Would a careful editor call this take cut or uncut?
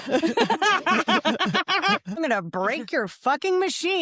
cut